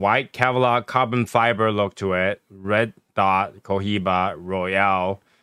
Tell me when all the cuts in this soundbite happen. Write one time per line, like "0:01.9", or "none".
none

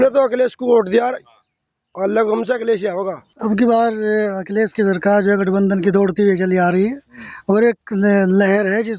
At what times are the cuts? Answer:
0:03.2

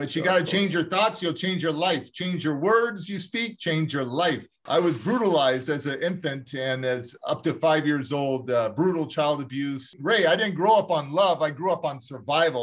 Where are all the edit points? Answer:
0:04.5
0:09.9

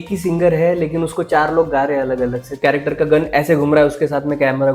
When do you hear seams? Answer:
0:02.6

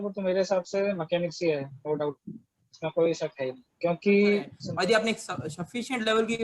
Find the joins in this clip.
0:04.6

